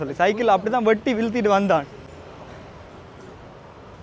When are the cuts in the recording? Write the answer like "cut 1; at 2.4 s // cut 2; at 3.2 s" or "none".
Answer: none